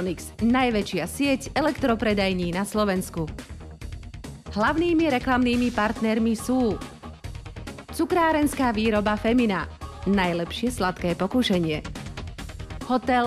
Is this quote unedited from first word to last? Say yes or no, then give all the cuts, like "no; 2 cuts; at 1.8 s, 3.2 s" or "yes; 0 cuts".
yes; 0 cuts